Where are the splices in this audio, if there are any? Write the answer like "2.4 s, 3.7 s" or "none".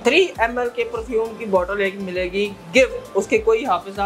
none